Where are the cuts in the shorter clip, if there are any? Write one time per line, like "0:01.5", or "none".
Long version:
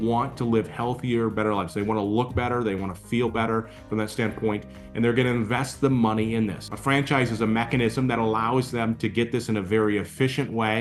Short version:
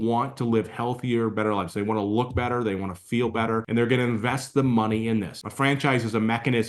0:03.7